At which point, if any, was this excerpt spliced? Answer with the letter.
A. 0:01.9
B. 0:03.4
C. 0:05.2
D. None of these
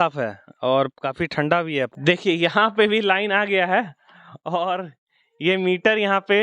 A